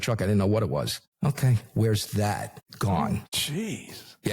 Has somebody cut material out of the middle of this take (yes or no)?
yes